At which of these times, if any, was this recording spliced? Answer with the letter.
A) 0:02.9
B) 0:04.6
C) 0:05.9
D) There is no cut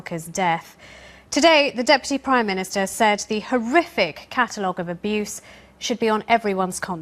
A